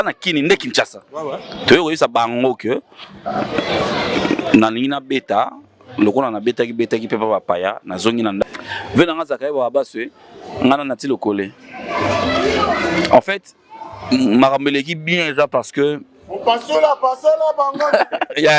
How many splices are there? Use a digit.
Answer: 1